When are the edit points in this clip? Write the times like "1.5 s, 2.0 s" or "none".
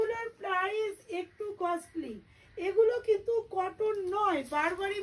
none